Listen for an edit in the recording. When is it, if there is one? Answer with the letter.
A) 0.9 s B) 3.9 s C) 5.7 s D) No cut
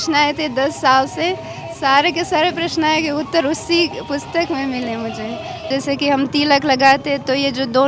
C